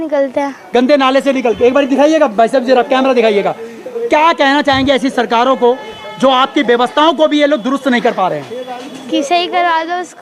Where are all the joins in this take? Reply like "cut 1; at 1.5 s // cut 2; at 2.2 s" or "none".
none